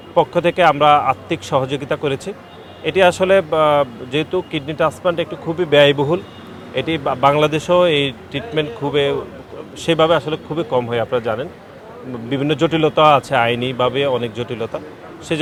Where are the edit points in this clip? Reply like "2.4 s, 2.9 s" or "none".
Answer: none